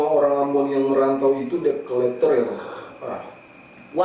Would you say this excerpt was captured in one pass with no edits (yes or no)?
yes